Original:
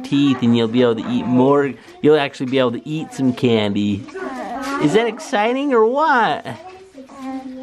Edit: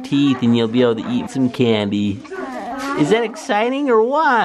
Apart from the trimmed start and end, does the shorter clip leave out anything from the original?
yes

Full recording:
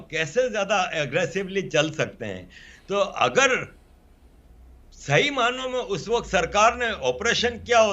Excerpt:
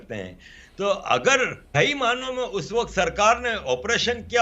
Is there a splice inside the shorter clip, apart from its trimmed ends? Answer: yes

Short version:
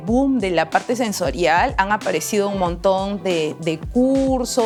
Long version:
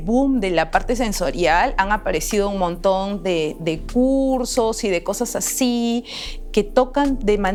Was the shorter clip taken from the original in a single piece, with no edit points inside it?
yes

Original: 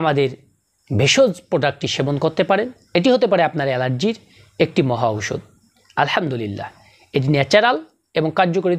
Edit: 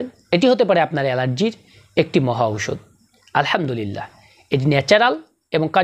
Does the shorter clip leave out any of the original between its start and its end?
no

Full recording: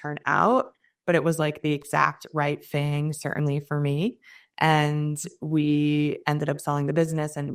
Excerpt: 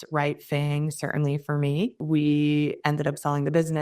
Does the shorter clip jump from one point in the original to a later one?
yes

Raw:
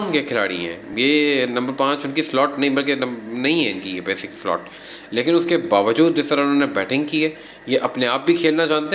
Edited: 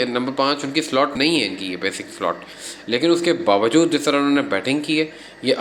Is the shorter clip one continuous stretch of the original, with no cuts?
no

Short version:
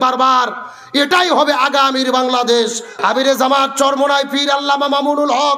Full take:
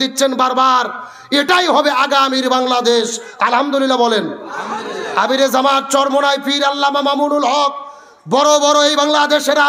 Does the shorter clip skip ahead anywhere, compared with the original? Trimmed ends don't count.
yes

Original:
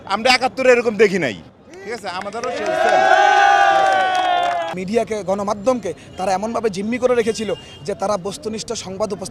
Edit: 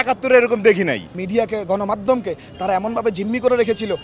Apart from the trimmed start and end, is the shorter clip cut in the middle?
yes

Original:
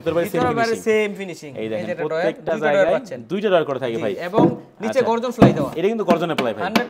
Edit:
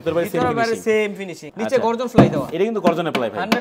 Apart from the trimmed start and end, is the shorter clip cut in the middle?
yes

